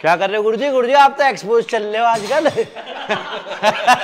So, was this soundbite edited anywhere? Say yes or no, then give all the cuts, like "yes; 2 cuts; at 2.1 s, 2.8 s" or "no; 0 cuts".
no; 0 cuts